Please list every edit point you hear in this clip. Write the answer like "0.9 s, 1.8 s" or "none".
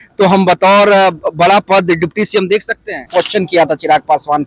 3.0 s